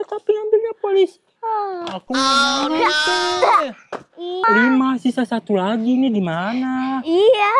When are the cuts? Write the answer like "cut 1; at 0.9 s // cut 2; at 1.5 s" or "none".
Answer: cut 1; at 4.4 s